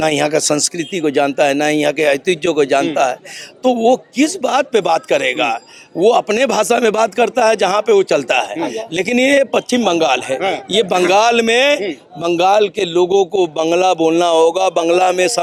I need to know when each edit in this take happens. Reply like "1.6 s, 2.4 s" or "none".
none